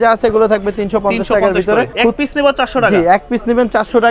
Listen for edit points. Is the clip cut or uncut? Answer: cut